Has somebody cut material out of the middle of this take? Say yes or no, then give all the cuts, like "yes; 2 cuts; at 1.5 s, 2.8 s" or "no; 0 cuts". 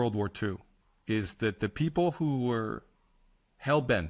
no; 0 cuts